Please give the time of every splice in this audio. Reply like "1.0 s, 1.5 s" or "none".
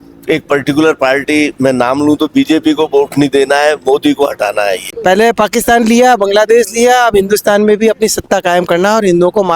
4.9 s